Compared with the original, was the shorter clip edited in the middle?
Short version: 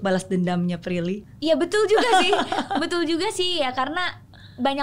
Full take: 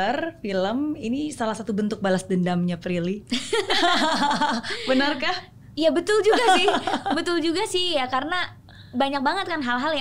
yes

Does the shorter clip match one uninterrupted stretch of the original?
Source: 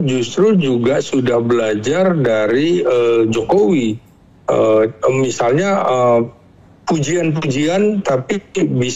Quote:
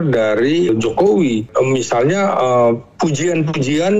no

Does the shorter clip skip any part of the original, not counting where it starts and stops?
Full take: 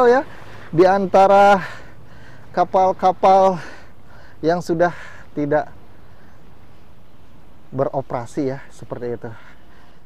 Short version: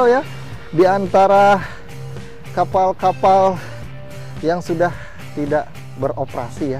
yes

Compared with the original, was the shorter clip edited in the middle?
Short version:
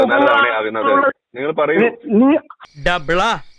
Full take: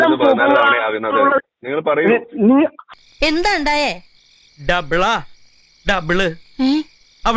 yes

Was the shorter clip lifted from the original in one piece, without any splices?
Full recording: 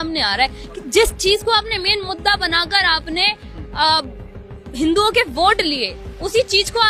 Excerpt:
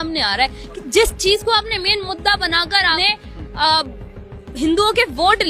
no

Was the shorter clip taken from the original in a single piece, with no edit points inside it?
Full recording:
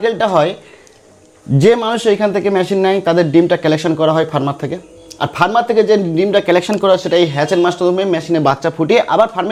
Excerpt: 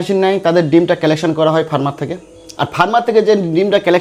yes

